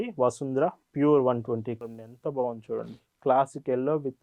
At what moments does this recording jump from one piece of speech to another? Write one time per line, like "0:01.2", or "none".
0:01.8